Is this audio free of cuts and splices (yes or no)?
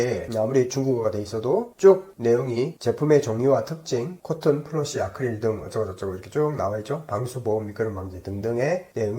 yes